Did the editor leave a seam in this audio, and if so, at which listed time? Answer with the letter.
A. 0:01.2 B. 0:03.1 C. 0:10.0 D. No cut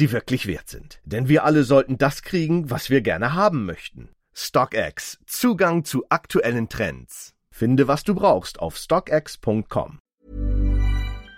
C